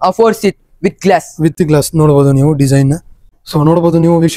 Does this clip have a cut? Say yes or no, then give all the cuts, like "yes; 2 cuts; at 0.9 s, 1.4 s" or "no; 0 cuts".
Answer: no; 0 cuts